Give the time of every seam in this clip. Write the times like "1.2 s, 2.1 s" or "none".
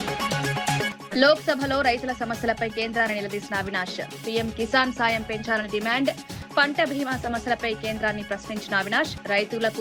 1.0 s